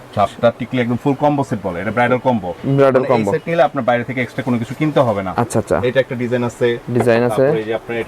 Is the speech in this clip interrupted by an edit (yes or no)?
no